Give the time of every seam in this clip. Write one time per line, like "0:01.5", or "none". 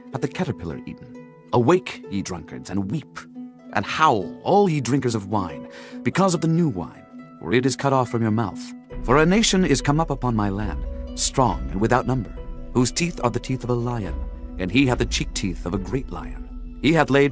none